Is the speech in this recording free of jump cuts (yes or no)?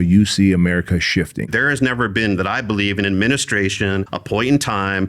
no